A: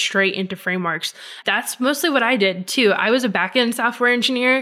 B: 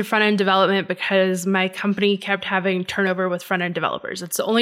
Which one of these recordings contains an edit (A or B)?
A